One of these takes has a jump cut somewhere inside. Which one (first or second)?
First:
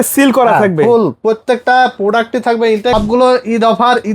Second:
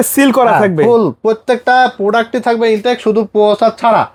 first